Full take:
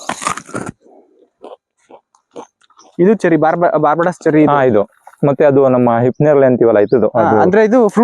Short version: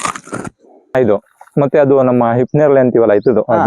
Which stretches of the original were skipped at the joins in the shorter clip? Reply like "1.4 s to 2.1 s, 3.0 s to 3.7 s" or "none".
1.2 s to 4.6 s